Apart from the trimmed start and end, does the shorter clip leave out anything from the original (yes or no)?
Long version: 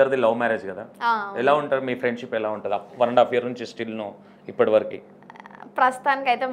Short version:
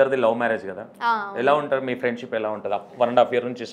no